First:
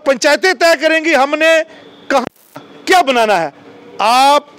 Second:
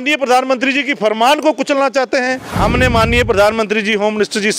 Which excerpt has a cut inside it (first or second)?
second